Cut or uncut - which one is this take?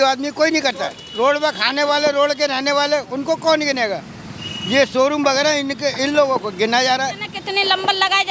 cut